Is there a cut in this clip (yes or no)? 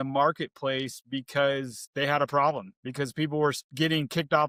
no